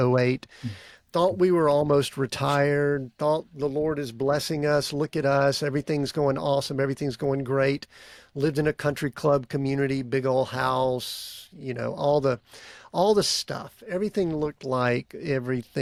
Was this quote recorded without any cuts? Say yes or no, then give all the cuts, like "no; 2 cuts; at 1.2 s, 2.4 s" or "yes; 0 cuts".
yes; 0 cuts